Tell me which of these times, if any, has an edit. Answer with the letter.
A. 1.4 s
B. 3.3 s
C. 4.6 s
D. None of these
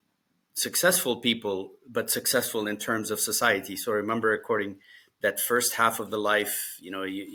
D